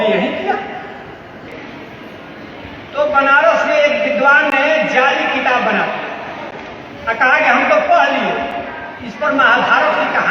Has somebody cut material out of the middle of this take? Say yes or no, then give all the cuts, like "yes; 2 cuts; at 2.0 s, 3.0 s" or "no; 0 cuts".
yes; 1 cut; at 1.5 s